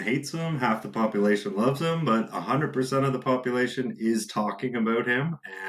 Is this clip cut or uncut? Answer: uncut